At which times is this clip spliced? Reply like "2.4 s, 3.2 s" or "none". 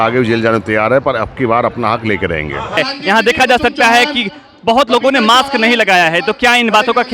2.8 s